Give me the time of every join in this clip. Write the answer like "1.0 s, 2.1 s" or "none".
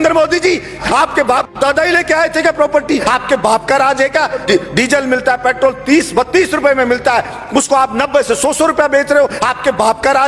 0.8 s, 3.0 s, 4.4 s